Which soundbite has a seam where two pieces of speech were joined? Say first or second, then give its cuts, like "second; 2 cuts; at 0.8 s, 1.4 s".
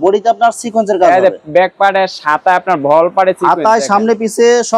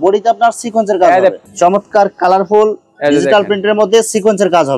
second; 1 cut; at 1.4 s